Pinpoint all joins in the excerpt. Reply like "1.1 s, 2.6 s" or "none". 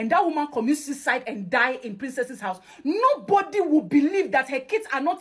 none